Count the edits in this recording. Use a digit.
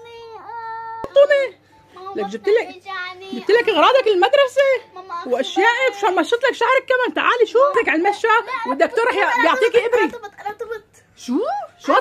2